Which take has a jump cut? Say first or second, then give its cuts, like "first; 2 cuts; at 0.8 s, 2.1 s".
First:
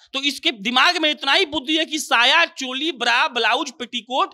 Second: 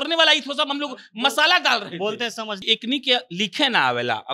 second; 1 cut; at 2.6 s